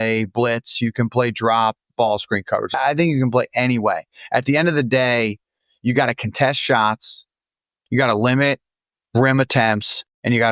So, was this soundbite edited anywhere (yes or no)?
yes